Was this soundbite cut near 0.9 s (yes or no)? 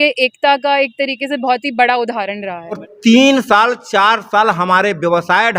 no